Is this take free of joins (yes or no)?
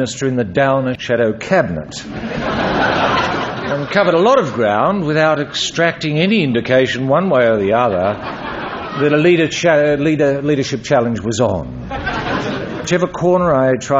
no